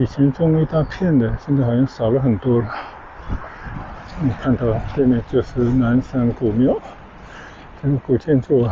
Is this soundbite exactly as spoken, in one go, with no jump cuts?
no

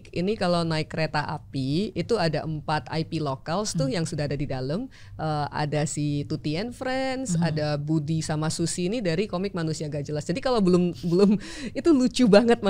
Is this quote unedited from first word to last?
yes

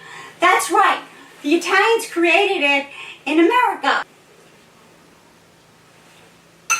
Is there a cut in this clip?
yes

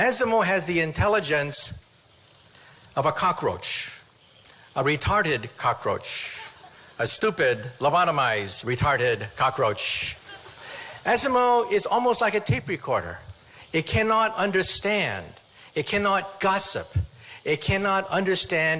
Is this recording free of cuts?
no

